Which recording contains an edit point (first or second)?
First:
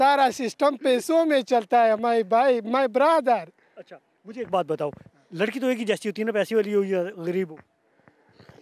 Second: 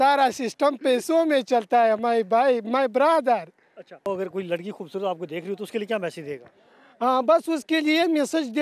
second